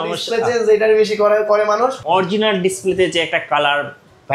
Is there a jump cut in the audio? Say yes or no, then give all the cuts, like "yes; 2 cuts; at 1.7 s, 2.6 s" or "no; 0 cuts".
yes; 1 cut; at 2.0 s